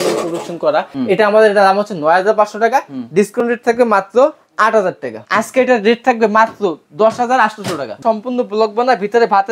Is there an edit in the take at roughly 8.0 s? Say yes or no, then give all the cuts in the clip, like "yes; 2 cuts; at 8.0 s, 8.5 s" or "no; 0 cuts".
yes; 3 cuts; at 0.9 s, 5.1 s, 8.0 s